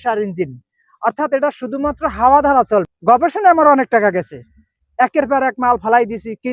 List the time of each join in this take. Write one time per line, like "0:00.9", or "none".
0:02.9